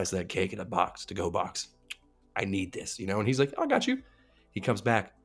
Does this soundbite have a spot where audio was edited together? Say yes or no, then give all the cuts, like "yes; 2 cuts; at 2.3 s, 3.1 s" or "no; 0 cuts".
no; 0 cuts